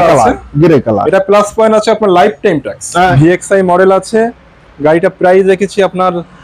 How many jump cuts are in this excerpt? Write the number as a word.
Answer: one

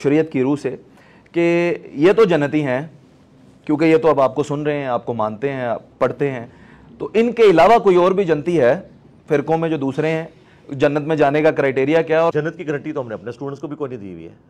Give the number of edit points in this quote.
one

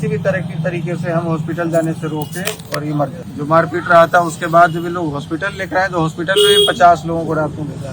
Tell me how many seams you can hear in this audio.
one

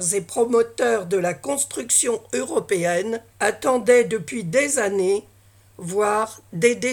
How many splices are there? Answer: one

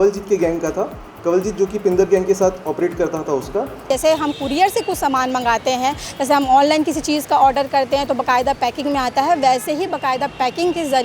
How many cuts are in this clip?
one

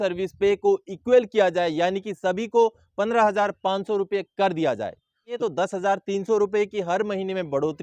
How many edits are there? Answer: one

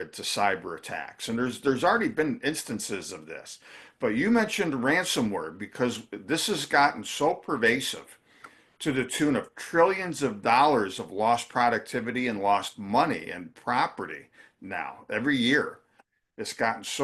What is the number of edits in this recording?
zero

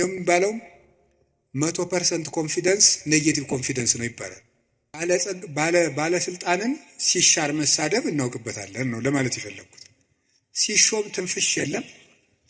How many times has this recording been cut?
one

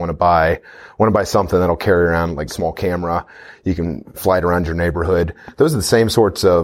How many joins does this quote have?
one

